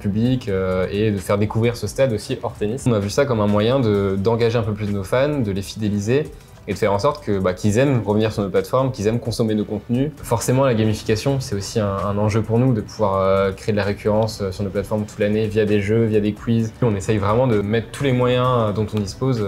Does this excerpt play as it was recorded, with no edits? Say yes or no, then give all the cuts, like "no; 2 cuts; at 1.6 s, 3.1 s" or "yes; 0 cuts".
no; 4 cuts; at 2.9 s, 10.2 s, 16.8 s, 17.6 s